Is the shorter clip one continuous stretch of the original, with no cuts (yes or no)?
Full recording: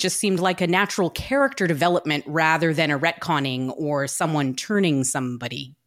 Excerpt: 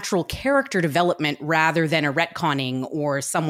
yes